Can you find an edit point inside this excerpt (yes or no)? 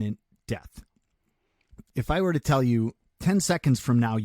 yes